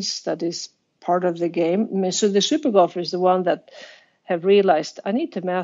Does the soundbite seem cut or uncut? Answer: uncut